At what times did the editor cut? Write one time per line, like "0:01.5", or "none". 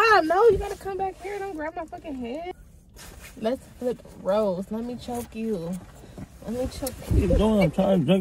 0:02.5